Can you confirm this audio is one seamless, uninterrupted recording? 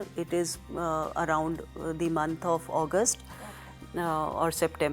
yes; 0 cuts

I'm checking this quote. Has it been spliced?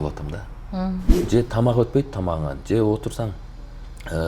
yes; 1 cut; at 1.3 s

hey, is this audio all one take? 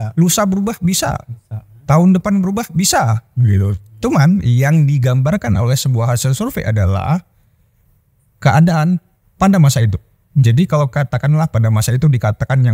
yes; 0 cuts

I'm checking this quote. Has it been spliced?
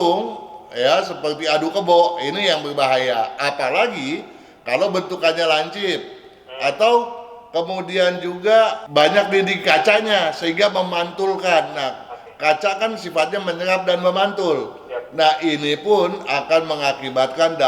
no; 0 cuts

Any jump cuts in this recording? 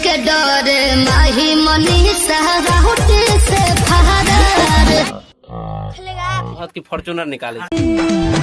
yes; 2 cuts; at 5.1 s, 6.6 s

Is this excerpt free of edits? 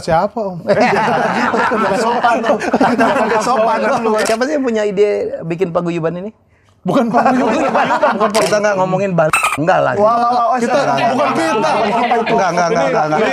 no; 2 cuts; at 4.2 s, 8.4 s

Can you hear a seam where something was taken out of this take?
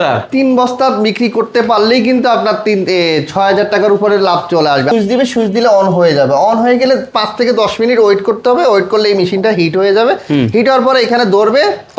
yes; 1 cut; at 4.9 s

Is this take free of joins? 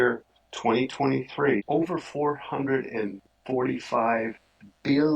no; 1 cut; at 1.6 s

